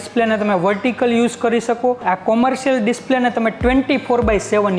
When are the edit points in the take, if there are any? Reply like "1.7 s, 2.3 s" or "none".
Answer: 2.0 s